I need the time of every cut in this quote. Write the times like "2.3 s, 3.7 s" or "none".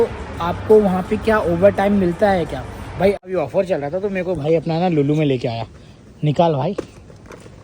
3.2 s